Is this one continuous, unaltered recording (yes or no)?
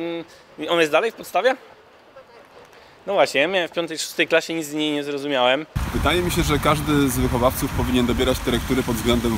no